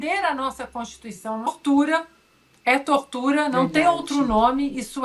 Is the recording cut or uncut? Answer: cut